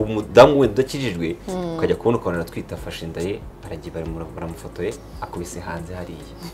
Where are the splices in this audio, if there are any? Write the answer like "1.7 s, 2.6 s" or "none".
none